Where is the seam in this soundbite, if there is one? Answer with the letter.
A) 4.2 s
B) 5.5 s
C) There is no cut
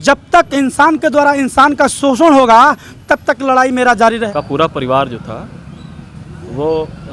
A